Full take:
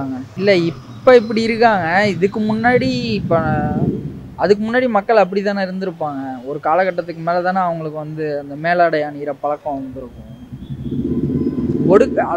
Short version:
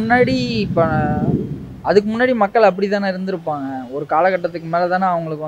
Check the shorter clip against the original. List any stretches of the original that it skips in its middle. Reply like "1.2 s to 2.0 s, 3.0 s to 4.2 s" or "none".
none